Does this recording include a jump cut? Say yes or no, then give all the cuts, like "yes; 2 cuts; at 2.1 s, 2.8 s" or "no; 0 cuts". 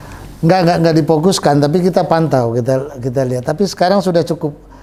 no; 0 cuts